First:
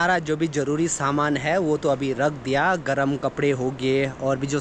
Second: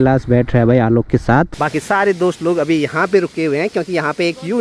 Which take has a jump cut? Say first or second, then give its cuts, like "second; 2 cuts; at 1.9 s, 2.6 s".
second; 1 cut; at 1.6 s